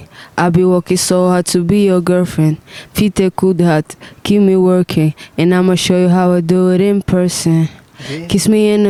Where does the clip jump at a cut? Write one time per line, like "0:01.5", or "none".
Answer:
none

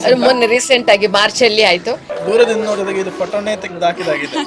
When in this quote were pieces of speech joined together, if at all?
0:02.1

